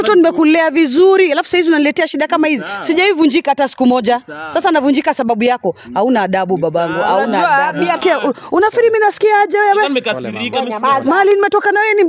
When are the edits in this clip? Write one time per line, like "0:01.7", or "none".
0:08.0